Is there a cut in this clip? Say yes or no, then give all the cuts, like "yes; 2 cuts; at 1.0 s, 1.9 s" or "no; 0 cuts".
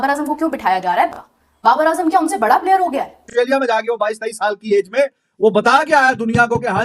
yes; 1 cut; at 3.2 s